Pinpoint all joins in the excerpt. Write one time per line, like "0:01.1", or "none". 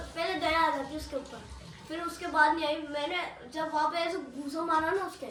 none

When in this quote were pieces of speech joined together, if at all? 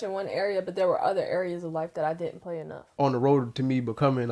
0:02.9

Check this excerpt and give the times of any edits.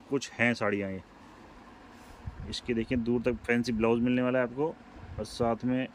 none

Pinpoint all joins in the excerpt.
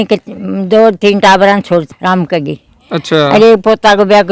0:01.9

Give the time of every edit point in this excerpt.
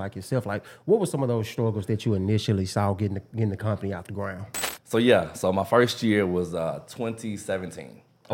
0:04.6

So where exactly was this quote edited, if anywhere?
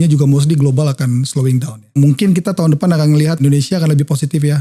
0:02.0
0:03.4

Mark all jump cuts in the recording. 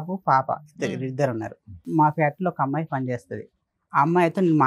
0:01.9

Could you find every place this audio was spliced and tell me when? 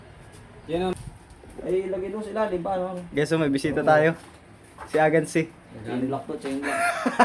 0:00.9

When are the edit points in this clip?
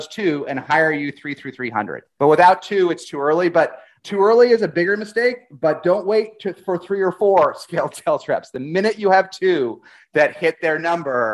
0:02.0
0:03.9

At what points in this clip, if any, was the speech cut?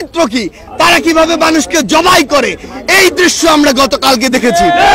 none

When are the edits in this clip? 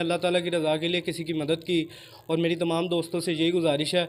none

